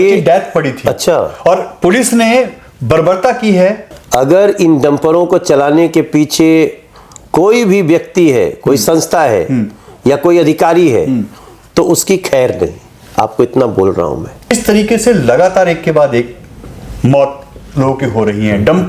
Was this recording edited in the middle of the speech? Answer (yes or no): yes